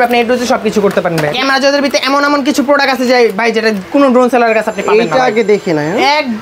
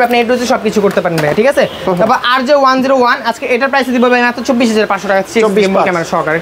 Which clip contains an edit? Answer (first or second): first